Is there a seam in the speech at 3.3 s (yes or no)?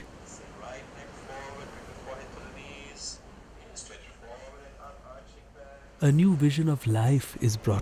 no